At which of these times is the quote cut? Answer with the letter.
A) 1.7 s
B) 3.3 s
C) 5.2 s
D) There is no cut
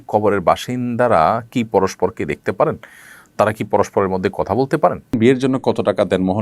C